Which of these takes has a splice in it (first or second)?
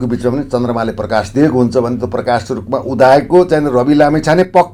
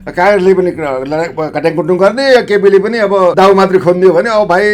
second